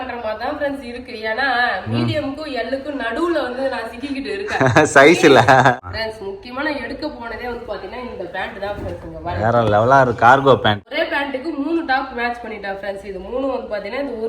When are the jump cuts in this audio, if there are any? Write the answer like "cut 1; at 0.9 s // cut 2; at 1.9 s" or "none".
cut 1; at 5.8 s // cut 2; at 10.8 s